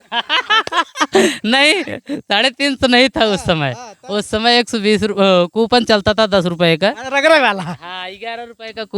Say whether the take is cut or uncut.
uncut